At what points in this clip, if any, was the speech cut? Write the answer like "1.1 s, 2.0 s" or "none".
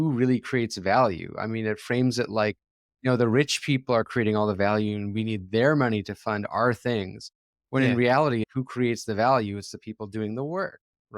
8.5 s